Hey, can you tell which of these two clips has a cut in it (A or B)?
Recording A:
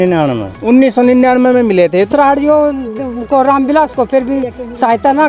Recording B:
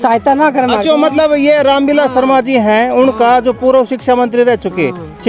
A